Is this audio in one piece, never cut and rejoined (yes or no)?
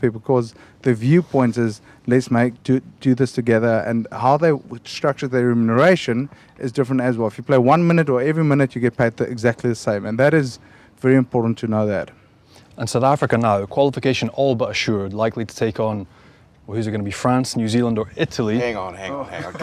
yes